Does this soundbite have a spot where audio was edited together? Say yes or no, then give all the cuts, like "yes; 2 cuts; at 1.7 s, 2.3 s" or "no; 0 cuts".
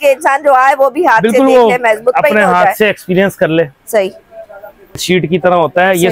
yes; 1 cut; at 5.0 s